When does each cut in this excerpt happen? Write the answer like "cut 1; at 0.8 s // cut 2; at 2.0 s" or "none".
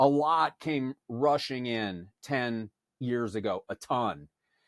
cut 1; at 3.0 s